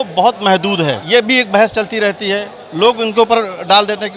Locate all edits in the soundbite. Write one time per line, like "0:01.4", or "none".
0:01.0